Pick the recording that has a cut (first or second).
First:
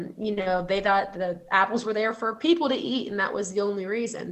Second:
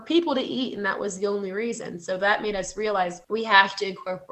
second